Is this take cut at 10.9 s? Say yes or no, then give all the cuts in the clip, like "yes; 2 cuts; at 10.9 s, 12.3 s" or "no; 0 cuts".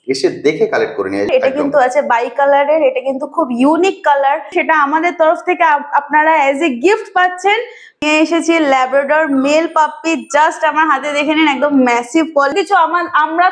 no; 4 cuts; at 1.3 s, 4.5 s, 8.0 s, 12.5 s